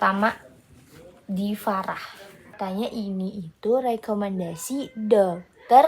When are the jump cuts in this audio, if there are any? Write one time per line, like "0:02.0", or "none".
0:02.5